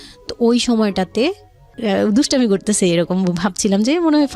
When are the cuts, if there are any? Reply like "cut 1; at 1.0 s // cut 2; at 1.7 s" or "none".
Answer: cut 1; at 1.7 s